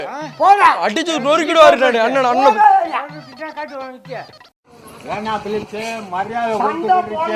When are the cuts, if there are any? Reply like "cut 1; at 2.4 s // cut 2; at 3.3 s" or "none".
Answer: none